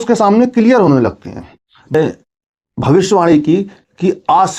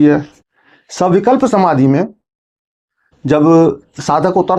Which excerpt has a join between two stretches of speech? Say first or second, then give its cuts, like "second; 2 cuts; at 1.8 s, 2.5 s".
first; 1 cut; at 1.9 s